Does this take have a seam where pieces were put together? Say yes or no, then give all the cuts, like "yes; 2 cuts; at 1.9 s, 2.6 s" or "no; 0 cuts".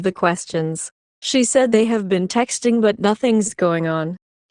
no; 0 cuts